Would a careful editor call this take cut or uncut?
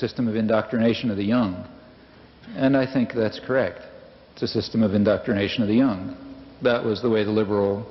uncut